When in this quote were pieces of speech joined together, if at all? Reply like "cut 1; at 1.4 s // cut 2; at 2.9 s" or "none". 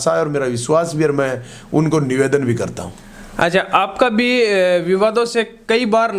none